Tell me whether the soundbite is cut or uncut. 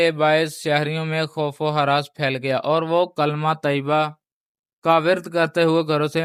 uncut